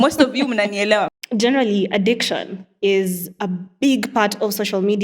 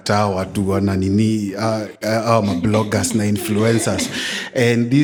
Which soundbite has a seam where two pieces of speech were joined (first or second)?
first